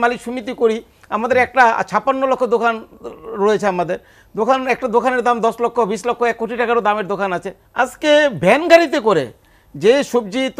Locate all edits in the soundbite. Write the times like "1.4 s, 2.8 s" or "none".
7.6 s